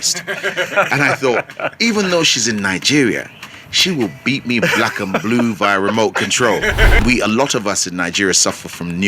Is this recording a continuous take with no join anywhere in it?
no; 1 cut; at 7.0 s

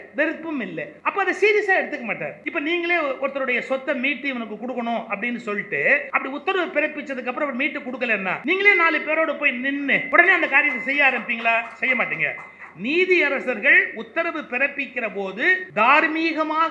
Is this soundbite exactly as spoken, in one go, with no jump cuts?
no; 6 cuts; at 0.9 s, 2.4 s, 6.1 s, 8.4 s, 10.0 s, 15.6 s

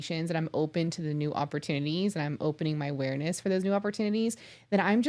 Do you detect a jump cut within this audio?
no; 0 cuts

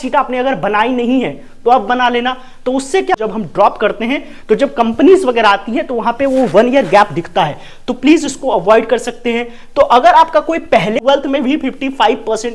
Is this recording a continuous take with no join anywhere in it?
no; 2 cuts; at 3.1 s, 11.0 s

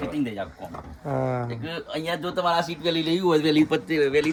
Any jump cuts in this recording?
no; 0 cuts

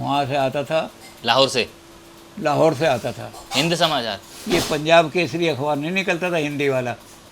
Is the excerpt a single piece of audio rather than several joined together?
yes; 0 cuts

